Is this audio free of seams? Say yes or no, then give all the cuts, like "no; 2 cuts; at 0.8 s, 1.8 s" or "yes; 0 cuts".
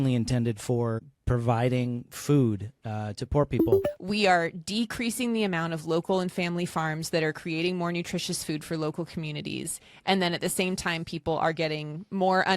no; 2 cuts; at 1.1 s, 3.9 s